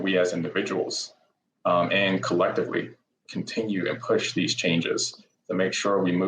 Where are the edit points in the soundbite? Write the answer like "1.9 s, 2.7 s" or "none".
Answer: none